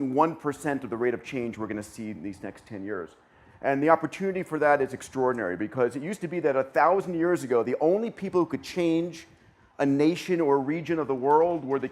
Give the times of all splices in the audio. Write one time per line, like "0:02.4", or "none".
0:09.6